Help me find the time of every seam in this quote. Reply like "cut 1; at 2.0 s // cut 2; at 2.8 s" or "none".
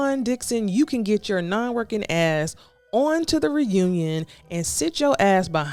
none

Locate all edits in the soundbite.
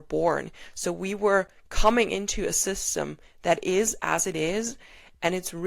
none

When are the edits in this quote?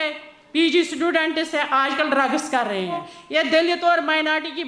cut 1; at 3.2 s

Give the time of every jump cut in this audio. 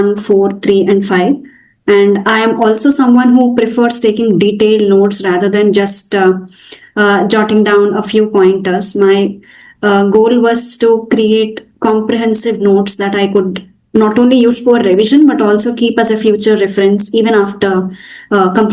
none

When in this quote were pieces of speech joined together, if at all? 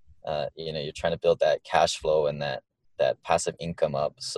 none

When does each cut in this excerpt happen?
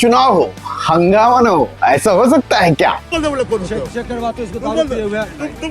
cut 1; at 3.1 s

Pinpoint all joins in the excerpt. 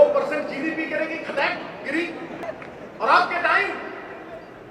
cut 1; at 2.4 s

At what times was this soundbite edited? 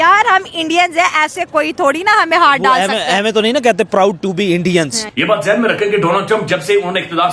cut 1; at 5.0 s

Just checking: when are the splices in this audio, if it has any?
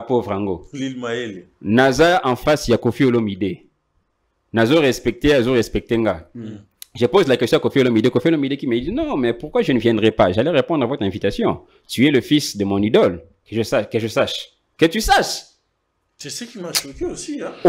none

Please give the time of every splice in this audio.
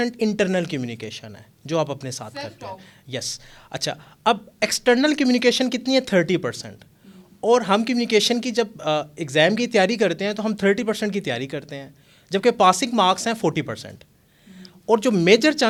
none

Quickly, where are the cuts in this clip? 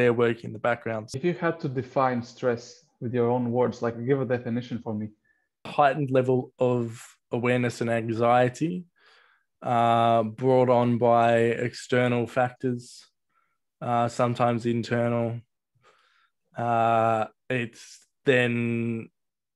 cut 1; at 1.1 s // cut 2; at 5.7 s

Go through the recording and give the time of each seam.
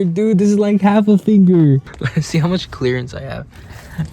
cut 1; at 2.0 s

